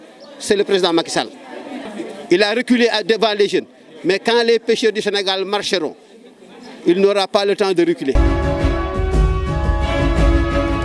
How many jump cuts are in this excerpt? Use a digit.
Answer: 2